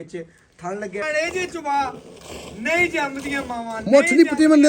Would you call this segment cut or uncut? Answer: cut